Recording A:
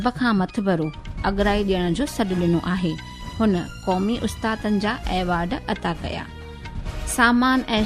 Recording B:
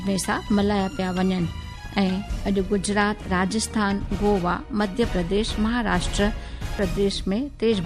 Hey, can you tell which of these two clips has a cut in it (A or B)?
B